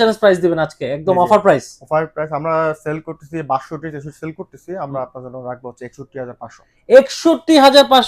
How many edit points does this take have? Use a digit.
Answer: 0